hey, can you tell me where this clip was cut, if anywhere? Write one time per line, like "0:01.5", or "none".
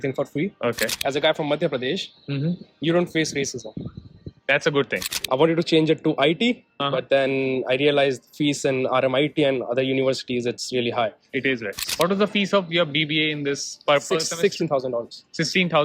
0:00.9
0:05.1
0:11.9

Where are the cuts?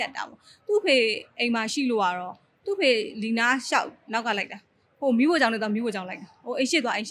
none

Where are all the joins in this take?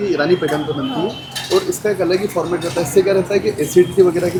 none

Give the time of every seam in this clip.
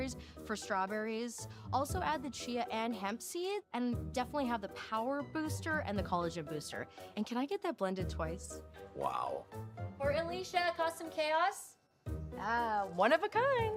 none

